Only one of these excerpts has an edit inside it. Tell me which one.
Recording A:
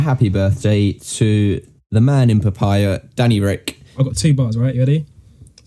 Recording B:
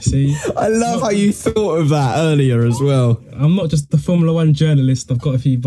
A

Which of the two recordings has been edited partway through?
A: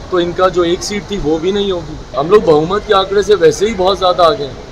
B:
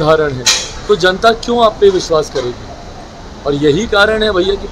A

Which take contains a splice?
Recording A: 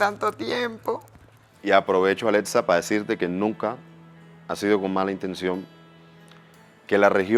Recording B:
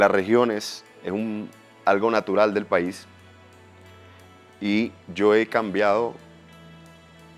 A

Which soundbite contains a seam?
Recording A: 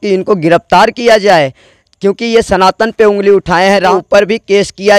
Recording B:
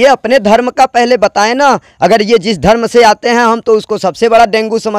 A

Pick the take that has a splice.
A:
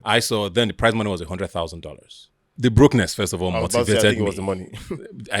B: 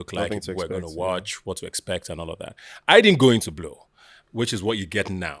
A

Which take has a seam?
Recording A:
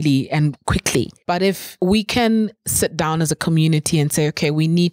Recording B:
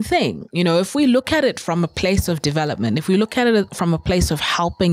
A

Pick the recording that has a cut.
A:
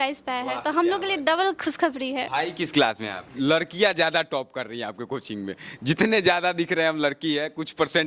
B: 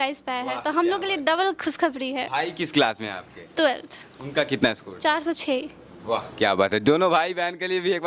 A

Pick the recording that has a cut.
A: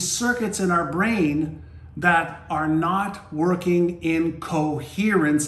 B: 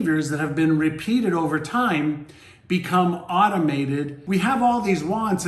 B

